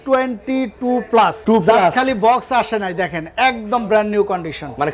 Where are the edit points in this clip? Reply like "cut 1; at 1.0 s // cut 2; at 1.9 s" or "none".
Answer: cut 1; at 1.4 s